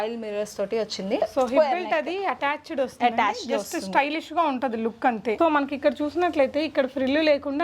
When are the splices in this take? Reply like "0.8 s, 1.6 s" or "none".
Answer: 1.2 s, 5.4 s